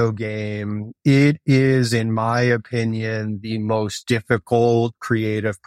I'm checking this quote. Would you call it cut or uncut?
cut